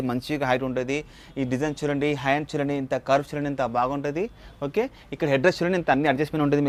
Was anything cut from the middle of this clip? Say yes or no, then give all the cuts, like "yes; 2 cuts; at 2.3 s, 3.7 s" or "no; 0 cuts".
no; 0 cuts